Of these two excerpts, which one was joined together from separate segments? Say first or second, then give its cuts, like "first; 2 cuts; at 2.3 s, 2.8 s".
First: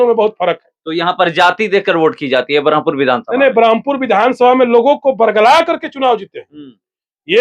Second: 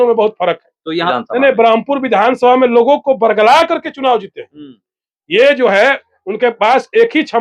second; 1 cut; at 1.1 s